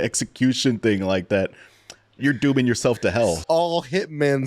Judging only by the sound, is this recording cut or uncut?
cut